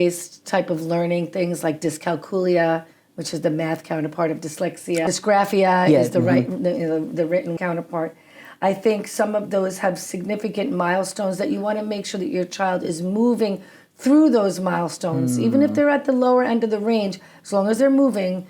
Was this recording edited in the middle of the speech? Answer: yes; 2 cuts; at 5.0 s, 7.5 s

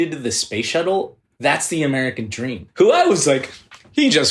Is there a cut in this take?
yes; 2 cuts; at 1.2 s, 2.6 s

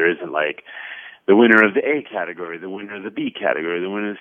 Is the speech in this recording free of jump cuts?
yes; 0 cuts

